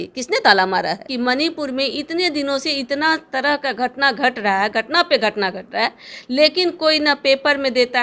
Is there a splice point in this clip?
yes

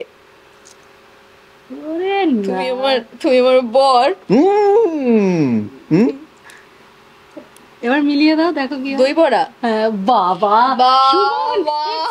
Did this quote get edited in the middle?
no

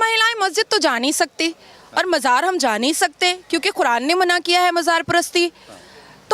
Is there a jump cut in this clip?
no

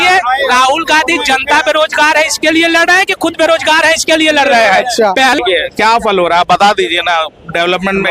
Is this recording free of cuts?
no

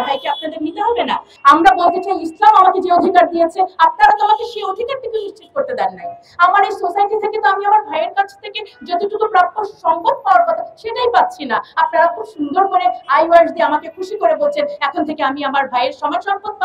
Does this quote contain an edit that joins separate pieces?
yes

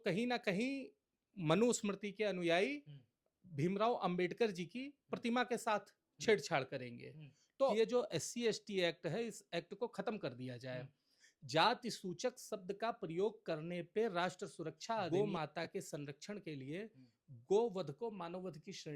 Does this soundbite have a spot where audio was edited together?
yes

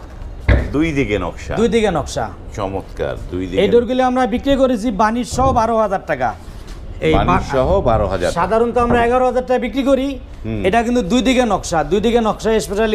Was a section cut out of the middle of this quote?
no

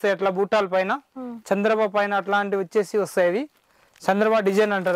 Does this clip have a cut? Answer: no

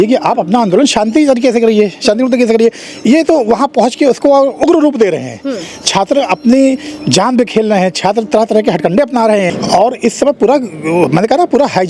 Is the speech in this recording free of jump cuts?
no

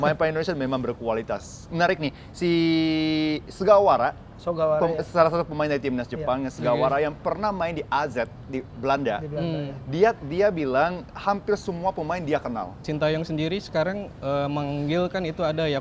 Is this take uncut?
no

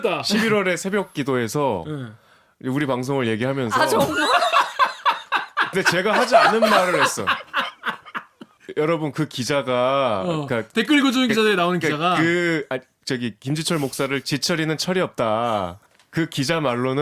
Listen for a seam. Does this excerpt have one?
no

